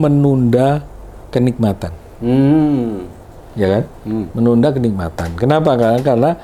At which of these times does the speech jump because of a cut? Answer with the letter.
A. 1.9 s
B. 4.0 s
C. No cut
C